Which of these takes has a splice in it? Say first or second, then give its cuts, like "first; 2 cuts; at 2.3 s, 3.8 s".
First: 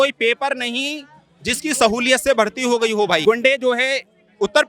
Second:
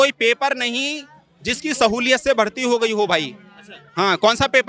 first; 1 cut; at 3.2 s